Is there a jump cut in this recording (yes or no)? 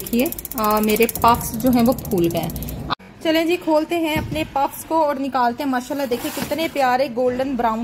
yes